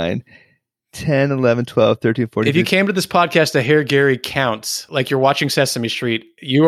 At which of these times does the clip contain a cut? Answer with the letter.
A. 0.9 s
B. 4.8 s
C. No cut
B